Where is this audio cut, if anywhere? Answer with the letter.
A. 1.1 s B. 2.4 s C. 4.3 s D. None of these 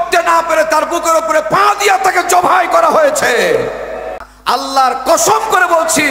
C